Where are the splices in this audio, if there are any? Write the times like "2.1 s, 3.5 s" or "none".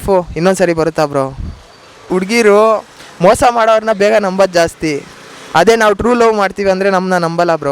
2.0 s